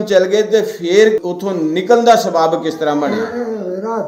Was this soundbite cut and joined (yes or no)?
yes